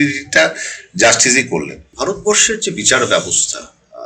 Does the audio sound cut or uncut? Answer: cut